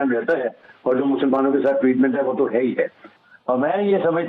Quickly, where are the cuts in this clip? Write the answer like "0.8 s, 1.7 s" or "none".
3.3 s

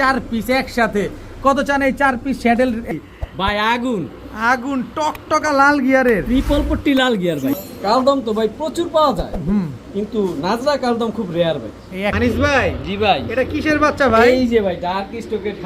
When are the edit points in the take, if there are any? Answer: 2.9 s, 7.5 s, 12.1 s

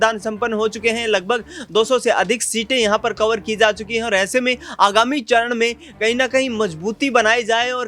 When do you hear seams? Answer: none

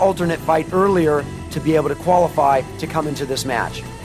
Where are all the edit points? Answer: none

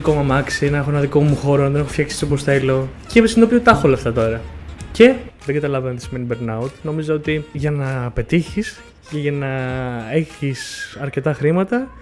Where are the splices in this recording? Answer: 3.0 s, 5.3 s, 7.5 s

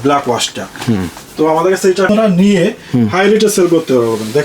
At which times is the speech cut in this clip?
2.1 s

